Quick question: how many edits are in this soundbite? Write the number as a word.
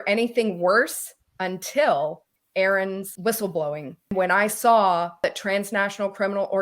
four